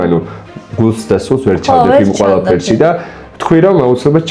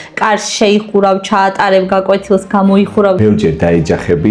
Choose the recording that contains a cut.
second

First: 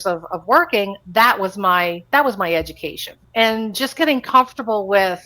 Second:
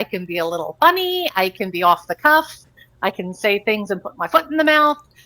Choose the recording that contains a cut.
first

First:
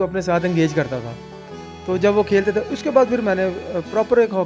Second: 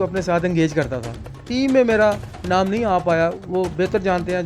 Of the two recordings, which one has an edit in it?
second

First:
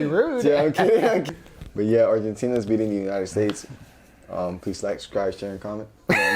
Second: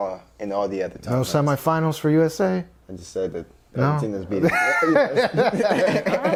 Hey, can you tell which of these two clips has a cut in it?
first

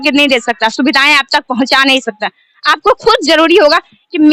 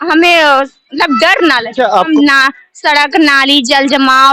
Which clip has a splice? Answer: second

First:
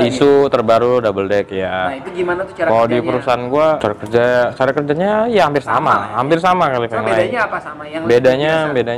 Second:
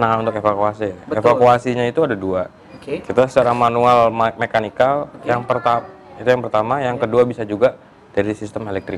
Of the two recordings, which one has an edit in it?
first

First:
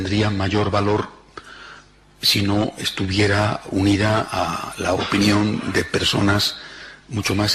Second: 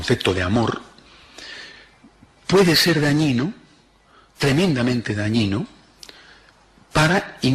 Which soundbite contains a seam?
second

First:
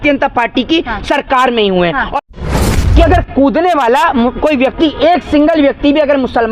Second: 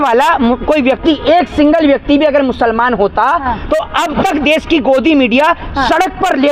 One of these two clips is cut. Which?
first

